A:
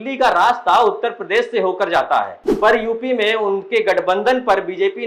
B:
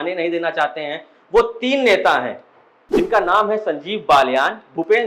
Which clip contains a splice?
A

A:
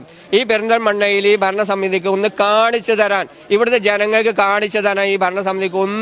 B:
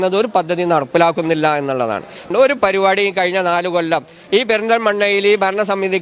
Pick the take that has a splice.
B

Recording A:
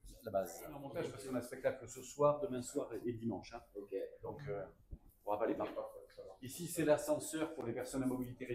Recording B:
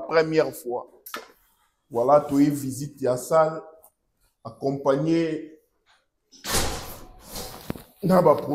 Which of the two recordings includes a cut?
A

